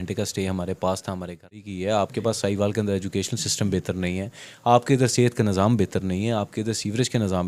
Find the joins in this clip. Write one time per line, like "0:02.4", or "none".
0:01.7